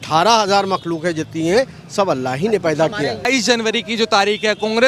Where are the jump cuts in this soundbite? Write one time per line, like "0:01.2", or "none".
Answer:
0:03.3